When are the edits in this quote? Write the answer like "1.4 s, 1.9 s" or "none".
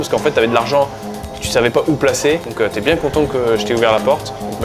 2.5 s